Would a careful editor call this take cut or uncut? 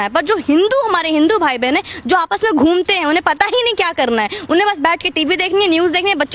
uncut